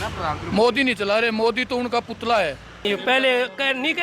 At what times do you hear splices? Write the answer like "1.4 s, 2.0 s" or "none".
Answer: 2.9 s